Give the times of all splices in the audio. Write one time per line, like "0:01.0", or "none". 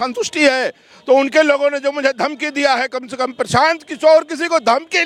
none